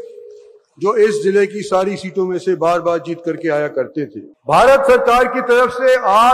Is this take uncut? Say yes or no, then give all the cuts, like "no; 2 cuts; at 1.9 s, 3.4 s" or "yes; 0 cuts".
no; 1 cut; at 4.3 s